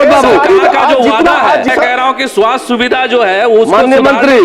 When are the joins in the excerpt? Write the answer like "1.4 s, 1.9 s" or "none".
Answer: 1.7 s